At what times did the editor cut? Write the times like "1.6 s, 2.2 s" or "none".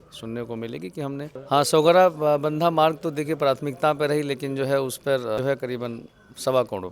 0.9 s, 5.1 s